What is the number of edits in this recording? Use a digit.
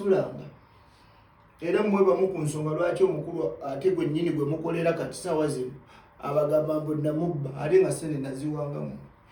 0